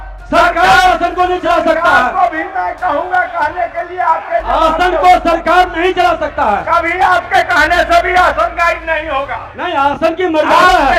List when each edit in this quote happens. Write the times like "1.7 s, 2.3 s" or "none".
none